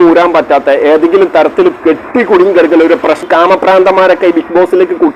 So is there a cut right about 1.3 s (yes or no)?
no